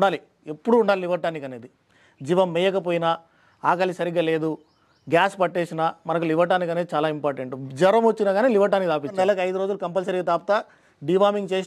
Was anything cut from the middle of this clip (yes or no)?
yes